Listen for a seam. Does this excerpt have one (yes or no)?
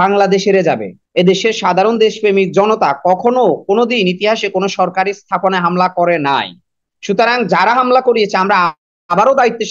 yes